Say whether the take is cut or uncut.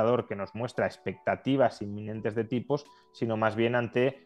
uncut